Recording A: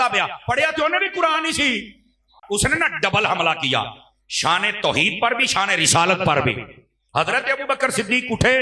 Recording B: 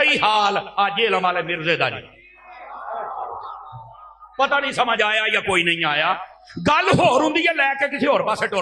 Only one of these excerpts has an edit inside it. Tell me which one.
A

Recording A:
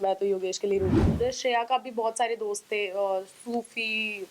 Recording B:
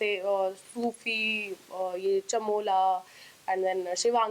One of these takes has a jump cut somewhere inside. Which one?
A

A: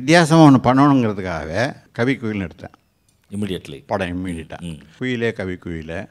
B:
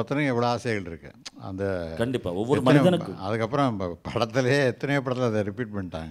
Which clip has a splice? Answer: A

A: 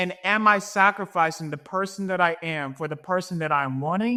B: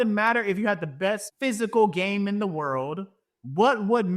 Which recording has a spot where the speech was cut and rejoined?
B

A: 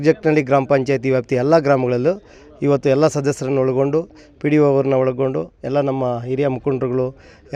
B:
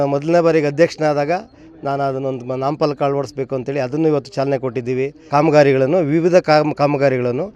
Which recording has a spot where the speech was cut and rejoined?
B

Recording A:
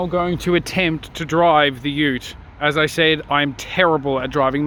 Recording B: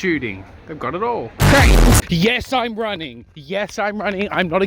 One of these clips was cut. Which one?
B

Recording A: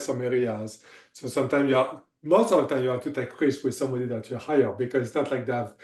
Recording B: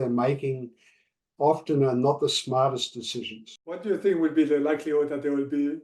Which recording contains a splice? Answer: B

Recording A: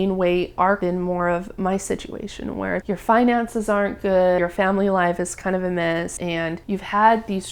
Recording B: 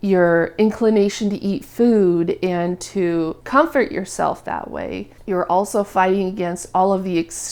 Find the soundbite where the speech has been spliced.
A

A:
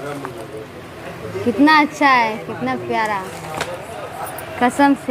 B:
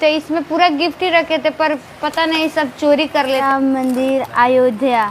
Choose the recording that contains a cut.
B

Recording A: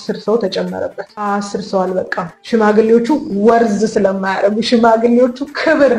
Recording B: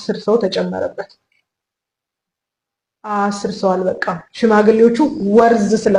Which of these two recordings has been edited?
A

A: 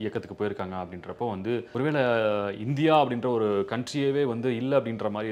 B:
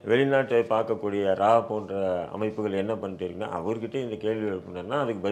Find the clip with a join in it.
A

